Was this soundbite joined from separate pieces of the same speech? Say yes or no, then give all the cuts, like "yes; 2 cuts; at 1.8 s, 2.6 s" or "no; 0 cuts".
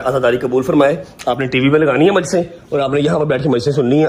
no; 0 cuts